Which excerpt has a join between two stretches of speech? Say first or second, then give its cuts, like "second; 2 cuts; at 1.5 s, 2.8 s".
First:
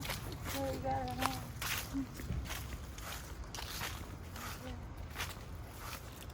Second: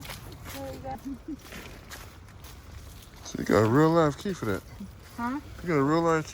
second; 1 cut; at 1.0 s